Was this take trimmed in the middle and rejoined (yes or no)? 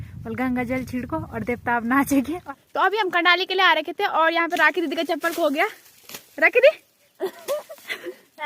yes